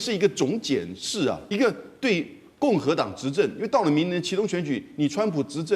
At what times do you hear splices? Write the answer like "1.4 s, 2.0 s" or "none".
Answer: 1.4 s

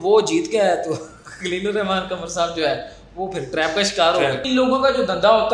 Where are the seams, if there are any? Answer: 4.4 s

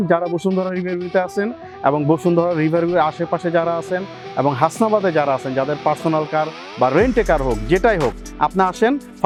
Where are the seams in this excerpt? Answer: none

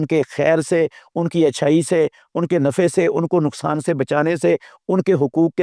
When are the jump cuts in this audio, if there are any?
none

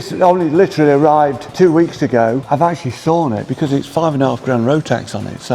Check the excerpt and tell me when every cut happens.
1.5 s, 2.4 s

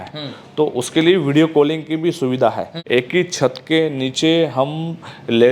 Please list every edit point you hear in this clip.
2.7 s

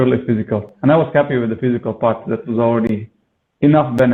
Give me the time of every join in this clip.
none

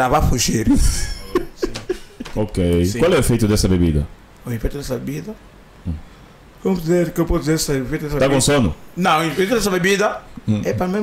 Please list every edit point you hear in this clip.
2.1 s

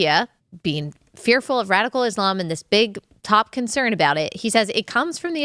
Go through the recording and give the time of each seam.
none

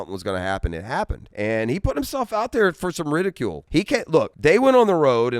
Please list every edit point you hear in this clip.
1.2 s, 4.0 s

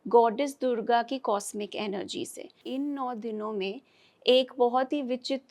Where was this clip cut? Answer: 2.6 s

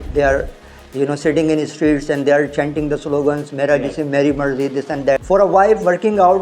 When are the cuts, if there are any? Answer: 5.2 s

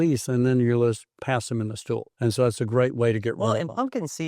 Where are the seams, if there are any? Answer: 2.1 s

